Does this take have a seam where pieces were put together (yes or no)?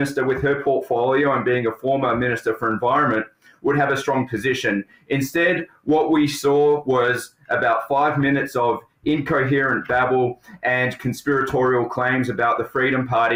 no